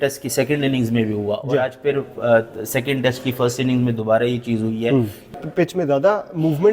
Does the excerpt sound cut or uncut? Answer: cut